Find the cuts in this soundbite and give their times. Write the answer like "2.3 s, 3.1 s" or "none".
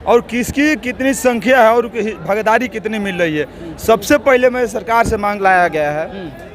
5.4 s